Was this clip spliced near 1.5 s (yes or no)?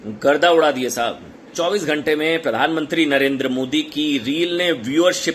yes